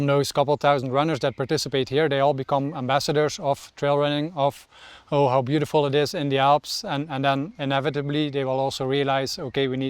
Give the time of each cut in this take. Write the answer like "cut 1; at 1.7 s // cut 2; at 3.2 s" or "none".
none